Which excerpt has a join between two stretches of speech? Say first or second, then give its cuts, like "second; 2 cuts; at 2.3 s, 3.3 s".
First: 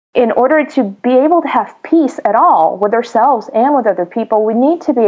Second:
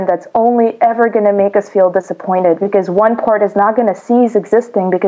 first; 1 cut; at 0.9 s